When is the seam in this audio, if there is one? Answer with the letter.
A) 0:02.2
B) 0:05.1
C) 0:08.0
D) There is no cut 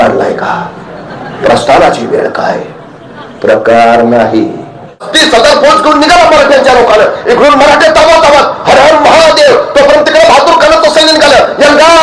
B